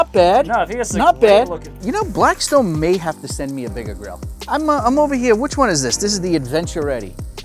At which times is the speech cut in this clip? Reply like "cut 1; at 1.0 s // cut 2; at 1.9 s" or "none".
cut 1; at 1.8 s // cut 2; at 4.4 s